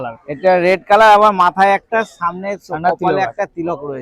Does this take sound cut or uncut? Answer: uncut